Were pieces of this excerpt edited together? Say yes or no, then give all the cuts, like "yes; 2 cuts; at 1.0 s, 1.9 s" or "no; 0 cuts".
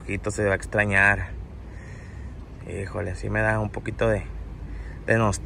no; 0 cuts